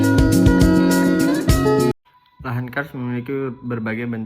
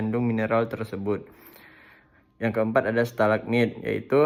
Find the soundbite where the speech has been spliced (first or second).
first